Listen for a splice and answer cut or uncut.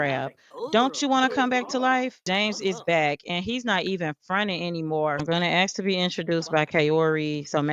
cut